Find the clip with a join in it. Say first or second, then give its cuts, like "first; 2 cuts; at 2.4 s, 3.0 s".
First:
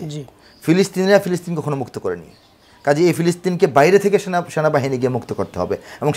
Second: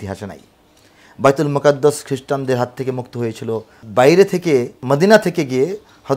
second; 2 cuts; at 3.8 s, 4.8 s